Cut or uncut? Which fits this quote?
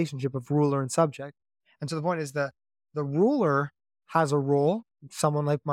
uncut